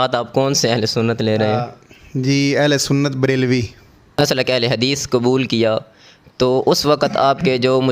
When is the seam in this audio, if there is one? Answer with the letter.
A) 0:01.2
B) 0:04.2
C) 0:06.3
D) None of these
B